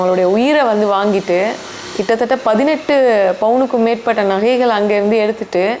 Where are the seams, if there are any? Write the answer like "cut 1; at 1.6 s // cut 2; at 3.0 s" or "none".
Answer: none